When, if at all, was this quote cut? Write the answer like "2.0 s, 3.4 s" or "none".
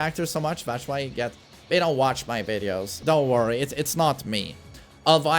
3.0 s